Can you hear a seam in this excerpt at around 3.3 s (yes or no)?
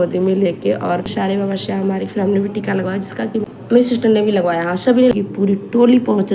yes